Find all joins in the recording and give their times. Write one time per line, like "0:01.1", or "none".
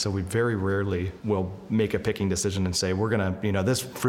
0:01.1